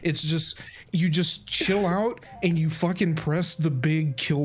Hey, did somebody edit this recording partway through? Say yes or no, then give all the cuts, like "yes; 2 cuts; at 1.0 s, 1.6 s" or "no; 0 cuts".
no; 0 cuts